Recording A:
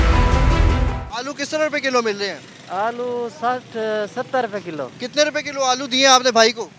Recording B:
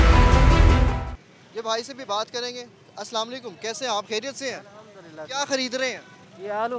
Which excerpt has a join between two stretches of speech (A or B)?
A